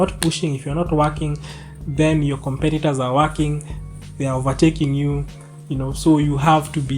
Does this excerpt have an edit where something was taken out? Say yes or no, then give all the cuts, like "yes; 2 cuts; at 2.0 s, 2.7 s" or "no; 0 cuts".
no; 0 cuts